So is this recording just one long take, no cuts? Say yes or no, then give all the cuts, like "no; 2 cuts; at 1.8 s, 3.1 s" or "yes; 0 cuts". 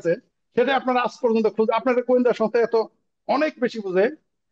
yes; 0 cuts